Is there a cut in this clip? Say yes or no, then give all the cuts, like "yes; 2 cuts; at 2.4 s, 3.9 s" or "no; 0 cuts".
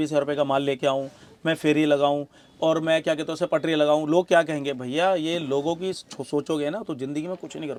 no; 0 cuts